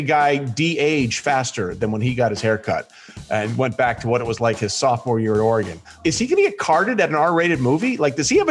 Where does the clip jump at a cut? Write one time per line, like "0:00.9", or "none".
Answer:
0:05.9